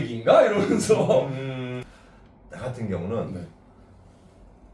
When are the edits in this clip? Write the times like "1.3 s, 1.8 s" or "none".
none